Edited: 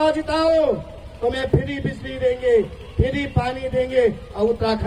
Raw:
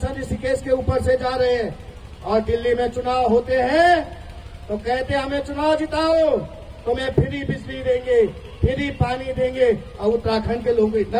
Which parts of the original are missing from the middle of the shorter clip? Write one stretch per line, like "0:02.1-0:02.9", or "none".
none